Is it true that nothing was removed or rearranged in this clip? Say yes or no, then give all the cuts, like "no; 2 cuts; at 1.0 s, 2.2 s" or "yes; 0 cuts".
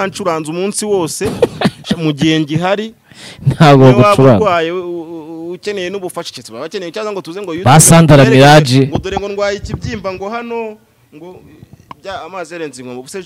yes; 0 cuts